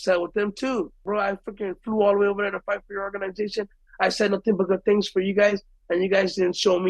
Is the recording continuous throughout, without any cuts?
no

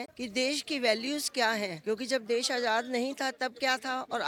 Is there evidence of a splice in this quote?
no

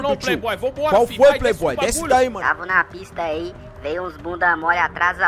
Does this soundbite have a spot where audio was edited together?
yes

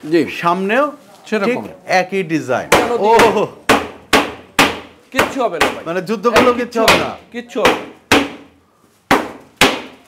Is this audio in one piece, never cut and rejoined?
no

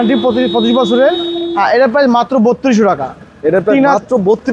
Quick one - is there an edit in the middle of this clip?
no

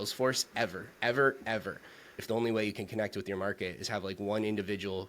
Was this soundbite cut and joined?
yes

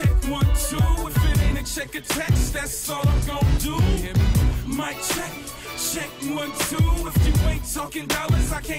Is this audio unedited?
yes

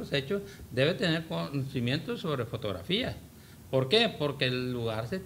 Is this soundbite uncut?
yes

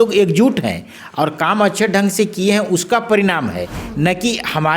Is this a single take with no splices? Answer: yes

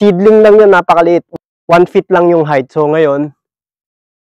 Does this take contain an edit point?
yes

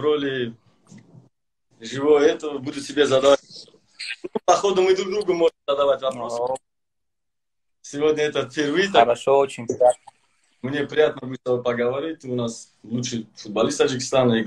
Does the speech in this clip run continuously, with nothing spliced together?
no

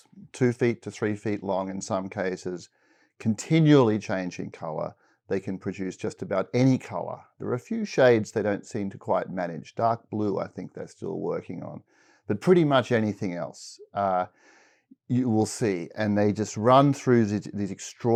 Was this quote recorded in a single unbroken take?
yes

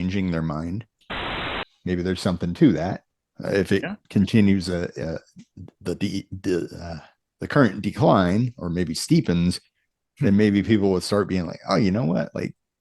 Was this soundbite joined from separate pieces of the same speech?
yes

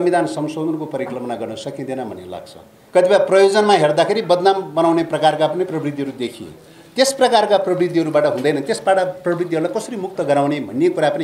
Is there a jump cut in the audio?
yes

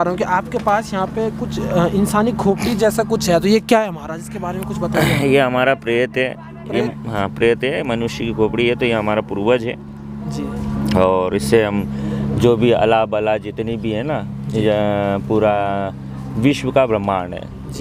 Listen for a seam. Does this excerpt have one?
no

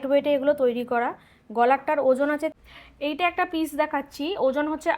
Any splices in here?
yes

